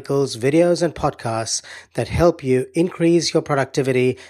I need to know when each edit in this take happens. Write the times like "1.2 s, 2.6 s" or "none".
none